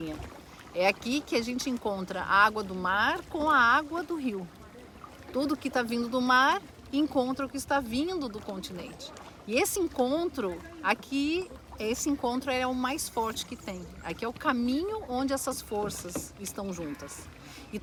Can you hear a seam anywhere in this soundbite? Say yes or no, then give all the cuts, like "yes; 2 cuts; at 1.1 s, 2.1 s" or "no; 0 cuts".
no; 0 cuts